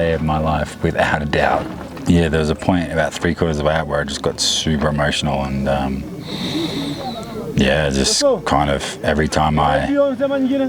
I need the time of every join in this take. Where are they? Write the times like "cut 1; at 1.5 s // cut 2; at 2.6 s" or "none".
cut 1; at 1.8 s